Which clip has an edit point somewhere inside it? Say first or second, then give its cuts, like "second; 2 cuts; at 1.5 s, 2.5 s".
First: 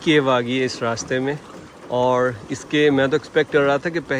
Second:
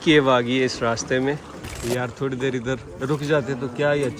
second; 2 cuts; at 1.7 s, 2.9 s